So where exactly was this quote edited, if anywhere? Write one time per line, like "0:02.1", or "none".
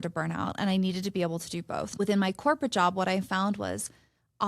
0:02.0

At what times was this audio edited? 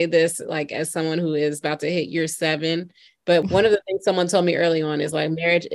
0:03.4

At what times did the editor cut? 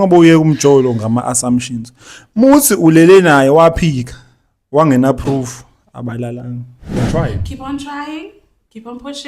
0:07.0

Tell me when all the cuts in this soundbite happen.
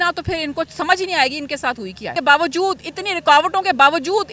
0:02.1

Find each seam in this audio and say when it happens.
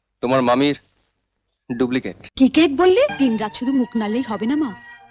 0:02.2
0:03.1

